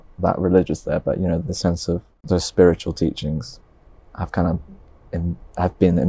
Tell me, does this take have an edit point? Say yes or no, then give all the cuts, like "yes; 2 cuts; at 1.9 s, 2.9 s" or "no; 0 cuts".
yes; 1 cut; at 2.1 s